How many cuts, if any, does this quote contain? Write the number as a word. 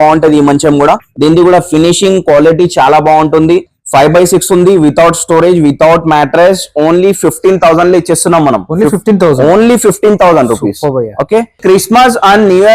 two